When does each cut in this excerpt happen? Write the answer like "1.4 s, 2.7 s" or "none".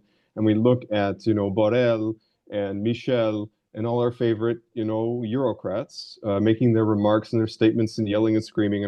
none